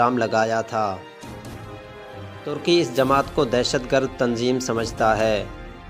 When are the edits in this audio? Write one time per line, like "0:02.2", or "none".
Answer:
0:01.1
0:02.4